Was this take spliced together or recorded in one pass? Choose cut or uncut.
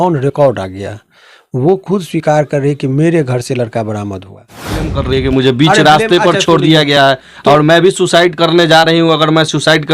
cut